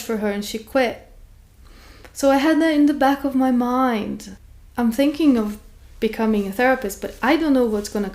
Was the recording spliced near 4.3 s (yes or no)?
yes